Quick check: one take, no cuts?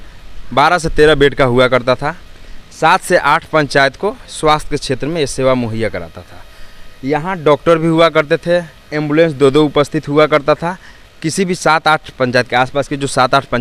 yes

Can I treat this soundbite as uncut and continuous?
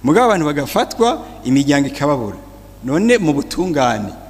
yes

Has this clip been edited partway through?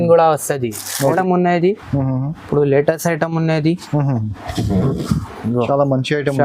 yes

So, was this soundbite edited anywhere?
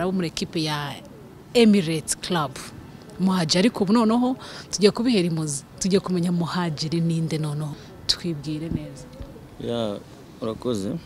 yes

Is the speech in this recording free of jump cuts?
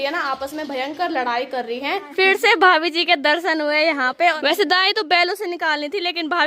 no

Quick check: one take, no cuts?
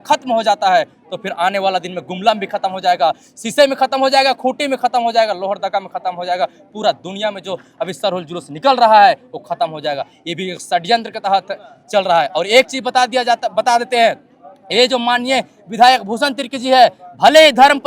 yes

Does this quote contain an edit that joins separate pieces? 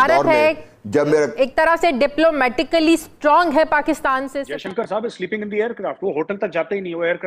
yes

